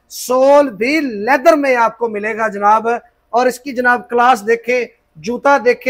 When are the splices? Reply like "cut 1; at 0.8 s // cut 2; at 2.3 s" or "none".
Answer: none

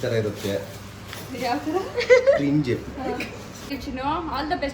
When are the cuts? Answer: cut 1; at 3.8 s

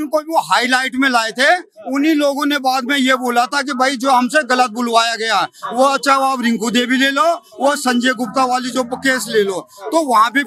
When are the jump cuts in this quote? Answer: none

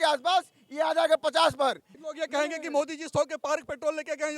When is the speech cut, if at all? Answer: cut 1; at 1.9 s

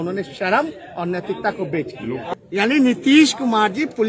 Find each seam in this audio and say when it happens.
cut 1; at 2.3 s

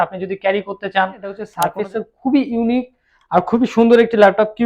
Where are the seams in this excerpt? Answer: cut 1; at 1.6 s

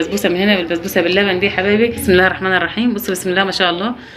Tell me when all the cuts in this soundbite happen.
cut 1; at 2.0 s

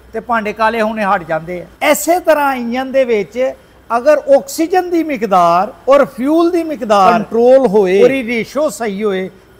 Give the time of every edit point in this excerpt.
cut 1; at 1.6 s // cut 2; at 5.7 s // cut 3; at 7.2 s // cut 4; at 8.0 s

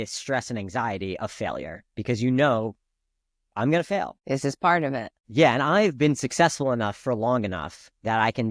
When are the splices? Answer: cut 1; at 4.2 s // cut 2; at 5.2 s

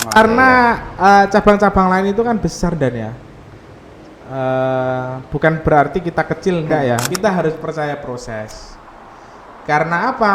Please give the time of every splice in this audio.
cut 1; at 7.1 s

